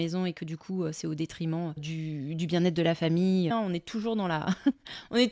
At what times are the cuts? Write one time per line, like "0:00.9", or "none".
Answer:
0:01.9
0:03.5